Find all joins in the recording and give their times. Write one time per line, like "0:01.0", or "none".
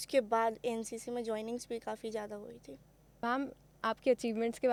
none

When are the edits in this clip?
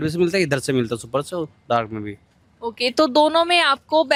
none

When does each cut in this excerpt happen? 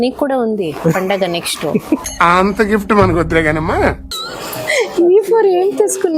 0:04.0

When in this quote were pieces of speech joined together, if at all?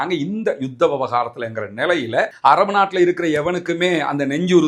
0:02.3

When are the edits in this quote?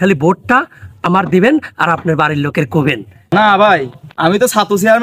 0:03.3

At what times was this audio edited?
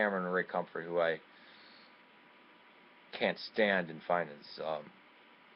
none

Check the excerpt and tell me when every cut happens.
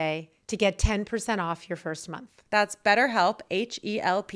none

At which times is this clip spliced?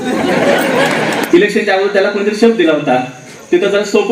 0:01.2

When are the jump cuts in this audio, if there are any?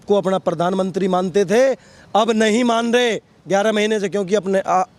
none

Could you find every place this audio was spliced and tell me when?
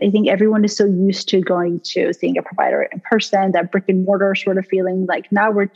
none

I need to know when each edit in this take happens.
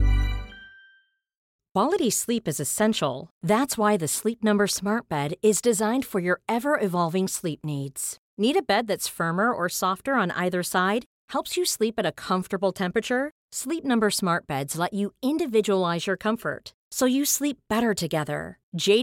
0:01.4

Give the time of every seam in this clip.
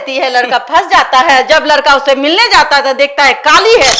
none

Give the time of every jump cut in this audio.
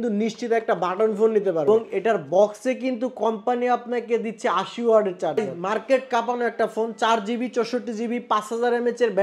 0:01.7
0:05.5

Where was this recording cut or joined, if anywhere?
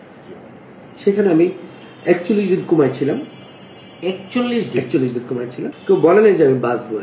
0:05.7

